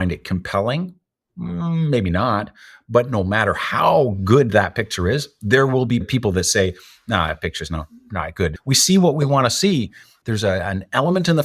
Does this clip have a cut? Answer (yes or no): yes